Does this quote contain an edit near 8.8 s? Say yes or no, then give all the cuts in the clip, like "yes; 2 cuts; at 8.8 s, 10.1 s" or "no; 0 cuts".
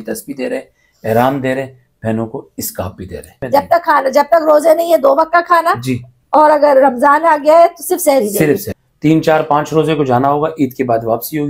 yes; 2 cuts; at 3.3 s, 8.8 s